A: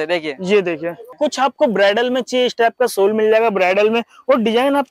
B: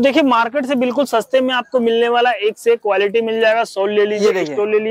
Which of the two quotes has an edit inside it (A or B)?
A